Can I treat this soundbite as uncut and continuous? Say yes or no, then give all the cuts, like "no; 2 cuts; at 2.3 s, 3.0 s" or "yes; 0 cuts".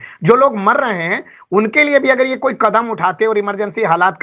yes; 0 cuts